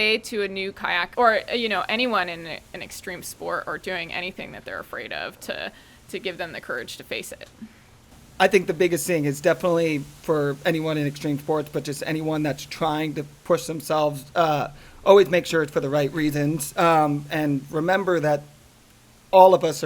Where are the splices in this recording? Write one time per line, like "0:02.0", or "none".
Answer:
0:01.1
0:08.2